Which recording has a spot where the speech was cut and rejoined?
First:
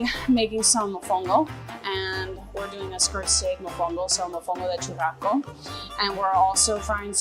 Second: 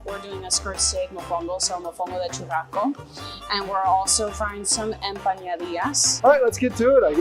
second; 1 cut; at 6.1 s

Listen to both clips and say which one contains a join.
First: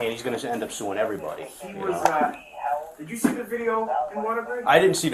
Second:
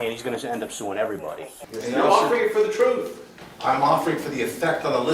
second; 1 cut; at 1.6 s

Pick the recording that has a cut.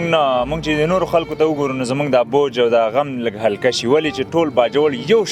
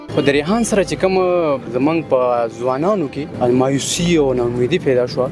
second; 2 cuts; at 1.7 s, 3.2 s

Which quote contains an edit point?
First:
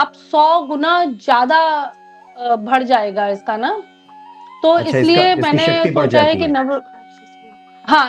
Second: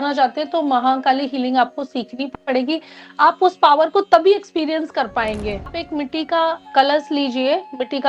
second; 1 cut; at 5.8 s

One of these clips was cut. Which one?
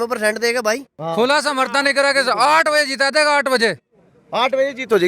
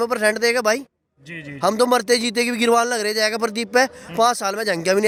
first; 1 cut; at 0.9 s

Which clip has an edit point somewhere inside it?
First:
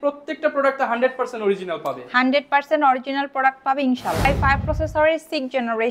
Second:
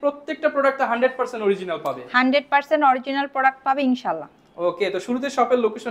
first; 1 cut; at 4.2 s

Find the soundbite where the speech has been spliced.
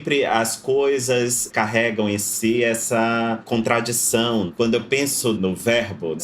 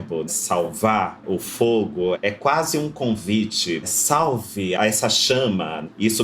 second; 2 cuts; at 3.8 s, 4.8 s

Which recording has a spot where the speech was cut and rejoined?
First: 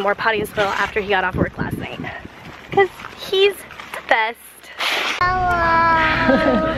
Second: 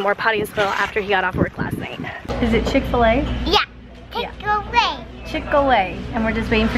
second; 1 cut; at 2.3 s

